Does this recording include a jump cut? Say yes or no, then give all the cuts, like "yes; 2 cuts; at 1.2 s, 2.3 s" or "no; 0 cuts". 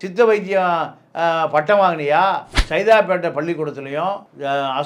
yes; 1 cut; at 2.6 s